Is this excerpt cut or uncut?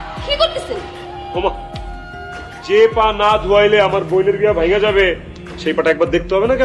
uncut